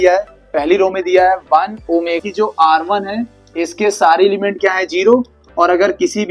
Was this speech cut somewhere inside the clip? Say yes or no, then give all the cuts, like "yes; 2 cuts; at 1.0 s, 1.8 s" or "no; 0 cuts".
yes; 1 cut; at 2.1 s